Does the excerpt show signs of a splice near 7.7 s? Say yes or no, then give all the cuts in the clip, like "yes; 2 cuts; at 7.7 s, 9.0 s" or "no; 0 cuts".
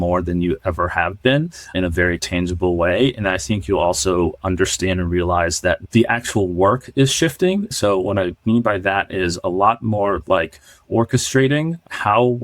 yes; 2 cuts; at 2.2 s, 7.7 s